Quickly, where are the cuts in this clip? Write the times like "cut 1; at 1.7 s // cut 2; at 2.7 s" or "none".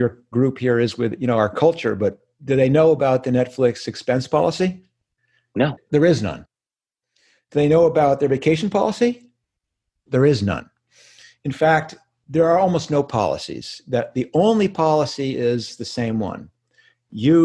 cut 1; at 2.3 s // cut 2; at 5.6 s

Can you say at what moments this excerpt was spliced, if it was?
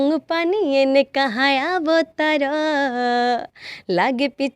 none

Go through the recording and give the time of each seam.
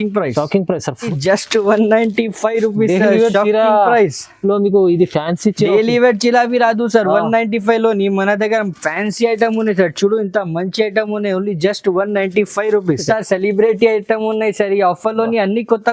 cut 1; at 1.1 s // cut 2; at 13.0 s

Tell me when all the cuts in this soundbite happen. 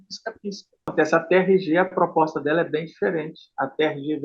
cut 1; at 0.9 s

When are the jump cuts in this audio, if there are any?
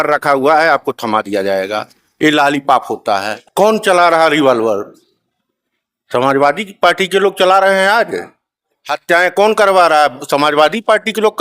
cut 1; at 3.4 s

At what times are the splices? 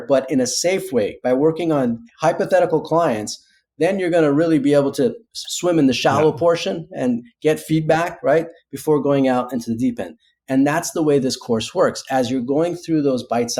none

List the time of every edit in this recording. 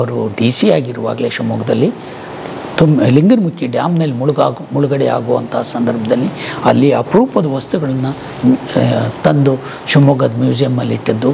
none

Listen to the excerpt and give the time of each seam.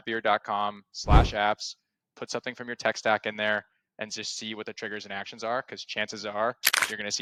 none

